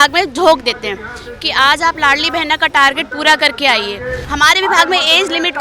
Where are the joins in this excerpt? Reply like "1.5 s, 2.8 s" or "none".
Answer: 4.2 s